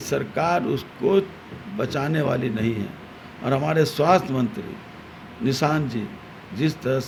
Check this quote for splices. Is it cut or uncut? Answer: uncut